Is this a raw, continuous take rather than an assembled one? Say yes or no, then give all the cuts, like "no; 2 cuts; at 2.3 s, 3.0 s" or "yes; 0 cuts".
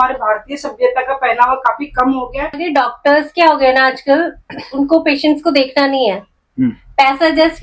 no; 1 cut; at 2.6 s